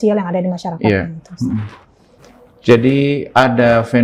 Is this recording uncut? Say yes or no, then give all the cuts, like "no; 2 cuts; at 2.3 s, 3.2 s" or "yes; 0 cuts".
yes; 0 cuts